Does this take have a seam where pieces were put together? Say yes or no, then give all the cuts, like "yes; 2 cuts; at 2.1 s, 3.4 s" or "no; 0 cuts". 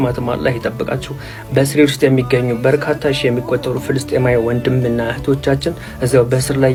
no; 0 cuts